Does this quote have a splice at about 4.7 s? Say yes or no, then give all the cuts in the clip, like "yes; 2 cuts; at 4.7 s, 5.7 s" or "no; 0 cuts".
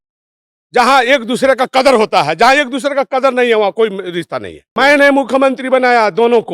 yes; 1 cut; at 4.7 s